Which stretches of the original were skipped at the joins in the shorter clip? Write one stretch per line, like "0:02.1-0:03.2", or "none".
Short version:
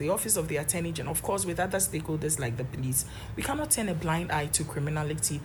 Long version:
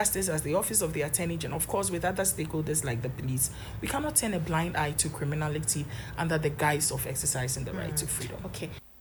none